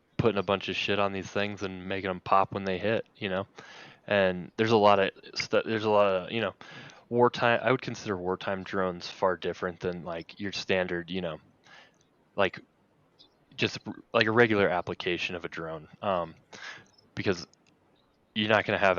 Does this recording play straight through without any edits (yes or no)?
yes